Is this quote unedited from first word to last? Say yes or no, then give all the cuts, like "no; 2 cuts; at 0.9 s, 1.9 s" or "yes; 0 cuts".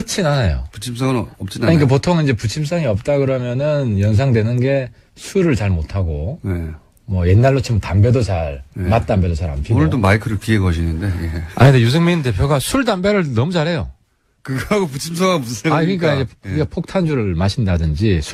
yes; 0 cuts